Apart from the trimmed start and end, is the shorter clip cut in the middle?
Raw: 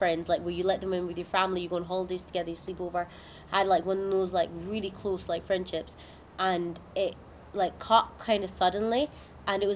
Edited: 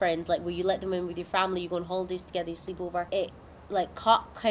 yes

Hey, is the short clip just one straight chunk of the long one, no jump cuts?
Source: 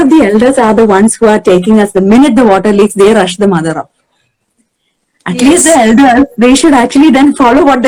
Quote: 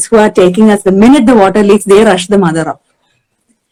yes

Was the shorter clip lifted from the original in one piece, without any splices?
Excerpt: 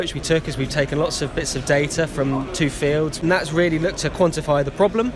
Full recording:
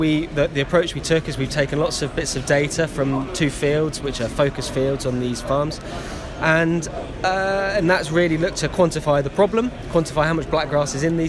no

